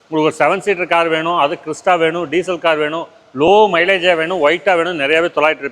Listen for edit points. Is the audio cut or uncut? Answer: uncut